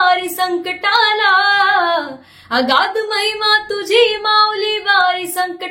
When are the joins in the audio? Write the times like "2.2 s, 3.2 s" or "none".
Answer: none